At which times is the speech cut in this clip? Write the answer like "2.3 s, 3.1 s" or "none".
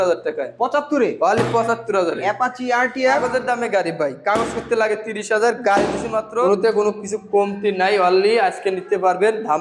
3.0 s, 6.3 s